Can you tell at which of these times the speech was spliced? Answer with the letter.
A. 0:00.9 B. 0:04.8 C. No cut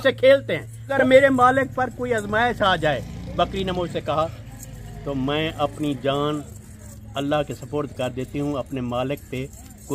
A